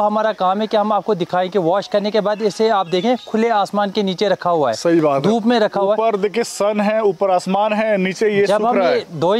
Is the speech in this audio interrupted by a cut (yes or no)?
no